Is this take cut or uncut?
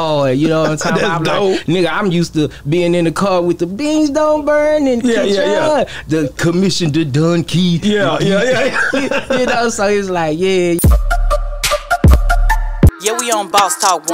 cut